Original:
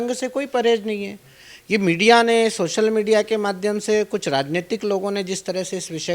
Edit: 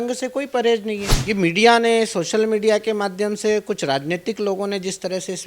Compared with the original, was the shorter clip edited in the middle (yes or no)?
yes